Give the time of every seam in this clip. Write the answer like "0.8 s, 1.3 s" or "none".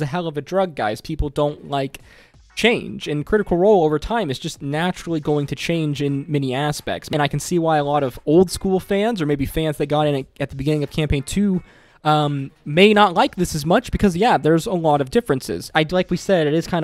7.1 s, 15.6 s